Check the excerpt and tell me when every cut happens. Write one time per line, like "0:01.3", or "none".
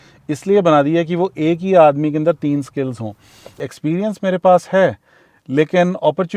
0:03.6